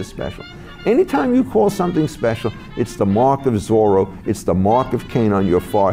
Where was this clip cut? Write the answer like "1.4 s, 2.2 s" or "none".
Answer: none